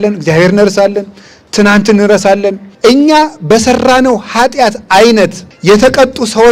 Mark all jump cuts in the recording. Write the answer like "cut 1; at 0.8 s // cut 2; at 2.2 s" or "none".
cut 1; at 2.6 s // cut 2; at 5.5 s